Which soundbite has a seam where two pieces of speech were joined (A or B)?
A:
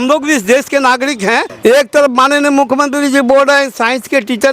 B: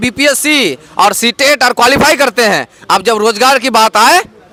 A